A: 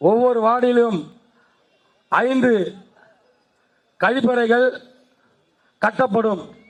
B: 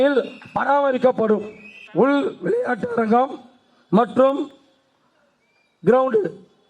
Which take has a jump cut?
B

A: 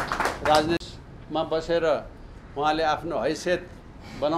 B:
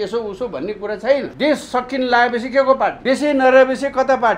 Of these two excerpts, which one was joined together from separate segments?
B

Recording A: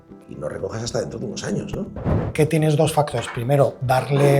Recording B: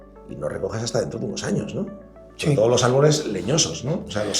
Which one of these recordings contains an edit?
A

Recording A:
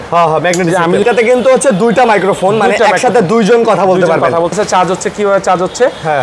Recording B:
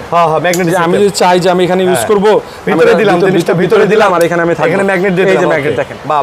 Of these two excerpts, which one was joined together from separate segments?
A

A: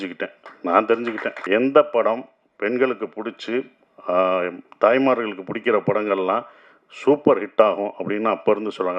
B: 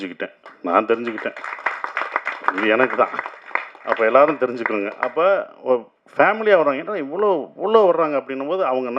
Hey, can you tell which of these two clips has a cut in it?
A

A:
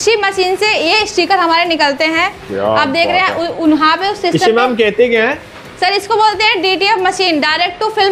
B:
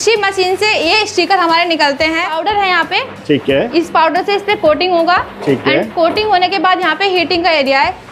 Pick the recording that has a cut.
B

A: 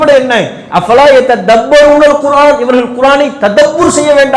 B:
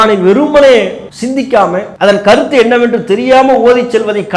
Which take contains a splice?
B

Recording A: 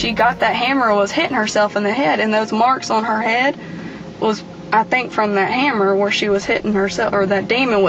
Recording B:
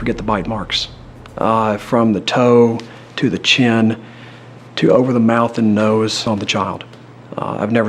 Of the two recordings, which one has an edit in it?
B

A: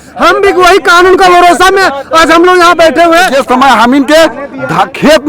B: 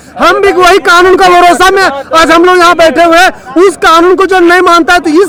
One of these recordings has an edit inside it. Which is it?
A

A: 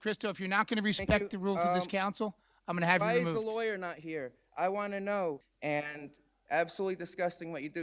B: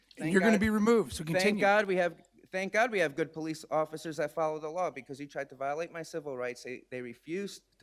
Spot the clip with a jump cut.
A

